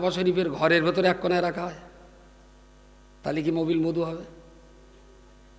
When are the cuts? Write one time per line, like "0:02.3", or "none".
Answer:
none

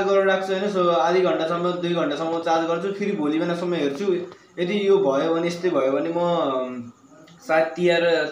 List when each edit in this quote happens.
none

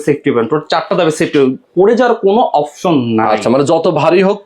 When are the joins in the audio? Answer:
none

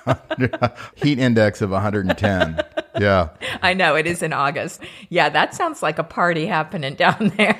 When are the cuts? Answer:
0:03.4
0:04.8

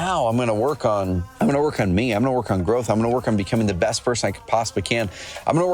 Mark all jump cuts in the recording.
0:01.3

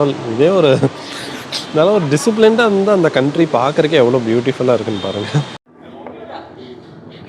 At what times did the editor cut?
0:05.7

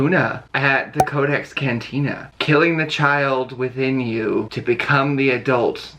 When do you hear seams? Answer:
none

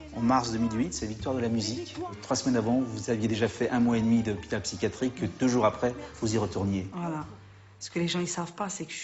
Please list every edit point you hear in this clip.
0:02.1

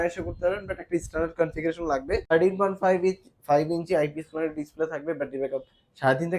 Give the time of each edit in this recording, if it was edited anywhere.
0:02.2

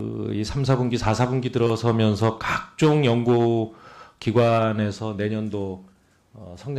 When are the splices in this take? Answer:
0:04.6

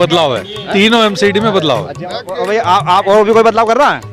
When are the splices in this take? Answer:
none

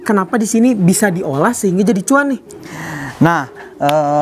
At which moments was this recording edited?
none

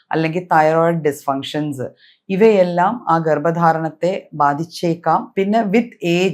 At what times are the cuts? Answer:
0:05.3

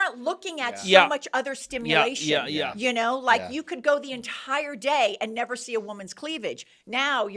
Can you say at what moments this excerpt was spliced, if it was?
none

